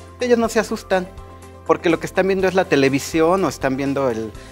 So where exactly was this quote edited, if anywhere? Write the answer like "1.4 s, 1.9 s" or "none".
none